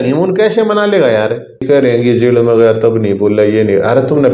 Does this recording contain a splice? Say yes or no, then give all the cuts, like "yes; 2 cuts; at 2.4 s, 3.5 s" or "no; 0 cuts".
yes; 1 cut; at 1.6 s